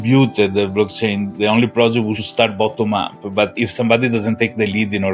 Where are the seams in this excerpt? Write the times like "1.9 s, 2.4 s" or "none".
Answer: 2.2 s, 3.5 s